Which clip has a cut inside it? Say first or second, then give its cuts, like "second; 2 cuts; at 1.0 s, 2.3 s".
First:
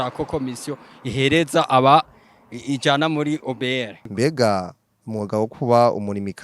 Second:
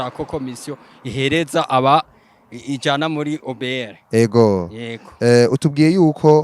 first; 1 cut; at 4.0 s